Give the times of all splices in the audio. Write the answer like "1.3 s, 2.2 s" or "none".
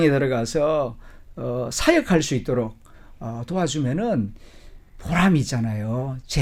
none